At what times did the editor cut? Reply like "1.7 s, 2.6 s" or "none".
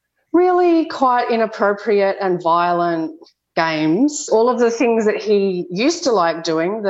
4.3 s